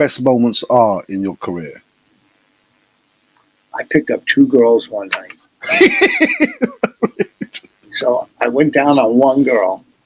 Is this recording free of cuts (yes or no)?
yes